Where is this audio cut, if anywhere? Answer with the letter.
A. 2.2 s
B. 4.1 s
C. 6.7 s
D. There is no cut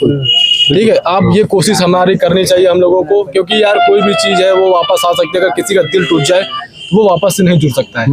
D